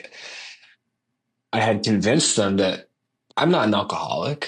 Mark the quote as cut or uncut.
uncut